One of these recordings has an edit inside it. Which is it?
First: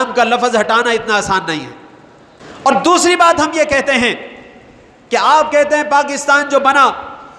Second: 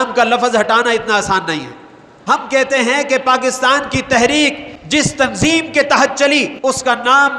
second; 3 cuts; at 2.1 s, 4.7 s, 6.5 s

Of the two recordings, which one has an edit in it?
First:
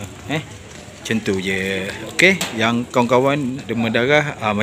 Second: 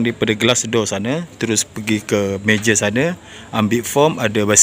first; 1 cut; at 3.7 s

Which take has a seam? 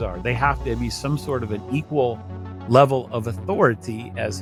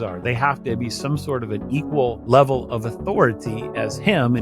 second; 1 cut; at 2.2 s

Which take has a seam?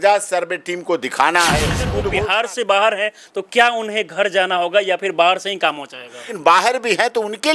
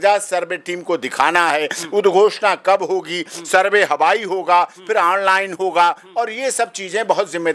first; 2 cuts; at 2.0 s, 6.2 s

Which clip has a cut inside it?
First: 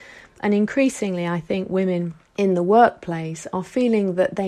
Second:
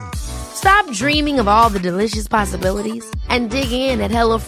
first; 1 cut; at 2.2 s

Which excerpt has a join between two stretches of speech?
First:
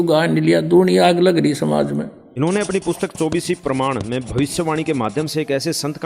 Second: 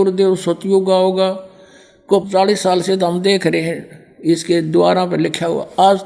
first; 1 cut; at 2.2 s

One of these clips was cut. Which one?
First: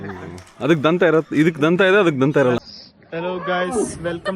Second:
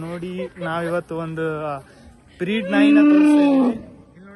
first; 1 cut; at 2.6 s

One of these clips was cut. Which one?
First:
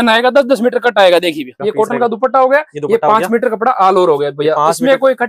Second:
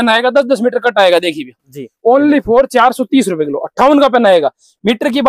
first; 1 cut; at 1.5 s

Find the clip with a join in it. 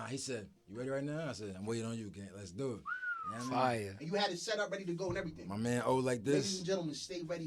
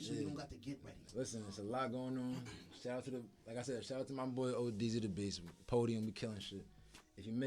second; 1 cut; at 1.0 s

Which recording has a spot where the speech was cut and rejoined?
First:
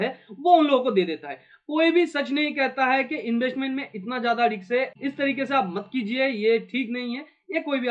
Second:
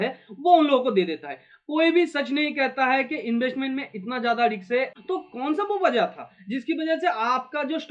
second; 1 cut; at 4.9 s

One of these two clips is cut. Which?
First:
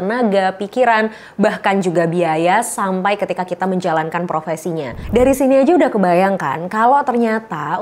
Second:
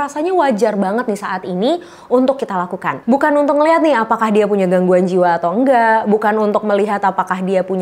first; 1 cut; at 5.0 s

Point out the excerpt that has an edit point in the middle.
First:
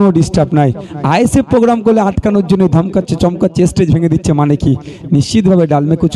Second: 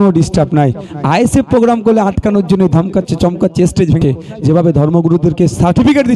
second; 1 cut; at 4.0 s

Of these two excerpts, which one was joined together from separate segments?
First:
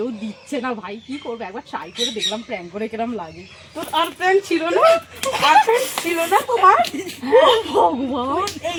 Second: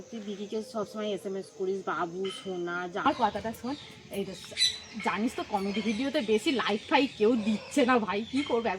second; 1 cut; at 3.0 s

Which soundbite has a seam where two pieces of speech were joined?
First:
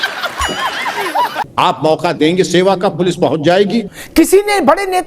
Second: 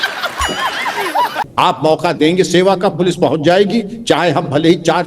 first; 1 cut; at 3.9 s

